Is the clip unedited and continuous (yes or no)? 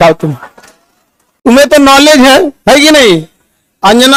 yes